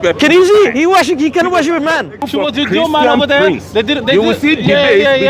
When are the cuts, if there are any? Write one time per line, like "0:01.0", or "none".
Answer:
0:02.3